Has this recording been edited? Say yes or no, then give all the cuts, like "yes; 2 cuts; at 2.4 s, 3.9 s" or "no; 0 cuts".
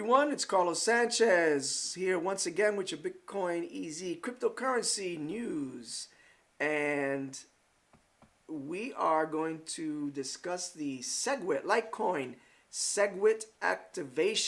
no; 0 cuts